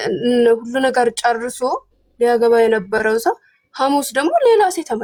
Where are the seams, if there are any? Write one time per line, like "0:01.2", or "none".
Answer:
none